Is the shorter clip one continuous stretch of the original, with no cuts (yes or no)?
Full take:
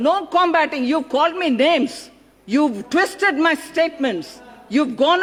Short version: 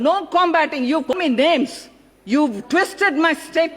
no